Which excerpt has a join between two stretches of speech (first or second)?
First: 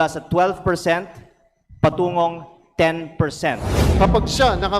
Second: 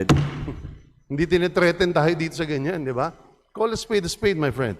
first